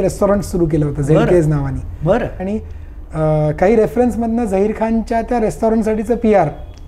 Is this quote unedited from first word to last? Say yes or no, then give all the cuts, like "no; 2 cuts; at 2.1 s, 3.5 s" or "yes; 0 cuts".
no; 1 cut; at 2.4 s